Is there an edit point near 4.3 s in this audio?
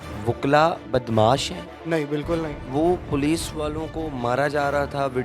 no; 2 cuts; at 1.7 s, 2.6 s

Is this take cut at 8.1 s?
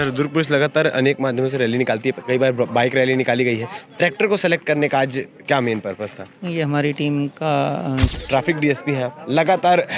yes; 1 cut; at 8.1 s

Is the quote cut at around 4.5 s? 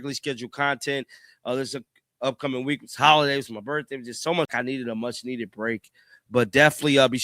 yes; 1 cut; at 4.5 s

